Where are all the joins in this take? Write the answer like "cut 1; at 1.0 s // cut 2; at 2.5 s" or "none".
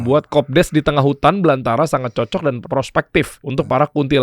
cut 1; at 2.6 s // cut 2; at 3.4 s